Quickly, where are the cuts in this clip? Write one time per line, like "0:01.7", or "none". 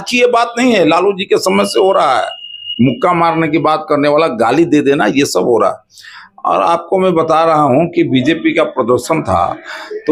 none